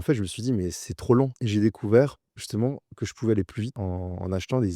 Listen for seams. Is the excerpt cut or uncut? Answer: cut